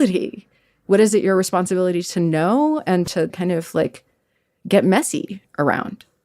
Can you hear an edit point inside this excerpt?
yes; 1 cut; at 3.3 s

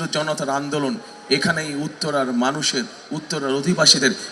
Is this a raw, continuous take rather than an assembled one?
yes; 0 cuts

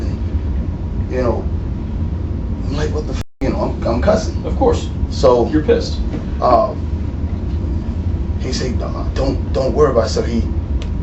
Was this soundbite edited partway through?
no; 0 cuts

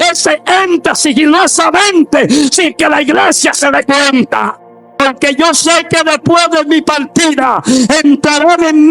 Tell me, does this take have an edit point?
yes; 1 cut; at 5.0 s

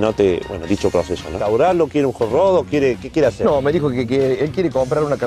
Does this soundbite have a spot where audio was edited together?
yes; 1 cut; at 1.4 s

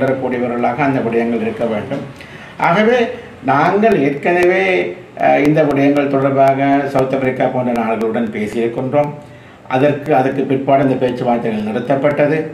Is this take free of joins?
yes; 0 cuts

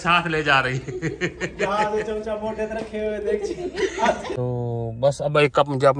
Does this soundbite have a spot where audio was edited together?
yes; 1 cut; at 4.3 s

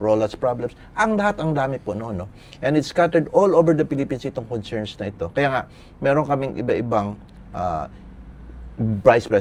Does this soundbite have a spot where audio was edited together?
no; 0 cuts

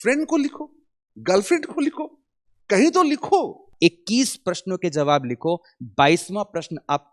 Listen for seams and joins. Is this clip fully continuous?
no; 1 cut; at 3.7 s

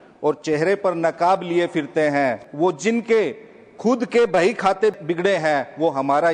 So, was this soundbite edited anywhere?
yes; 2 cuts; at 2.4 s, 5.0 s

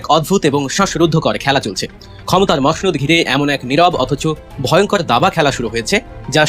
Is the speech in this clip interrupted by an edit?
no; 0 cuts

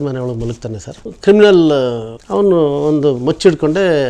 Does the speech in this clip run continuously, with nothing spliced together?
no; 1 cut; at 1.1 s

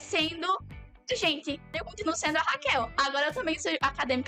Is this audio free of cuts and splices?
no; 1 cut; at 1.8 s

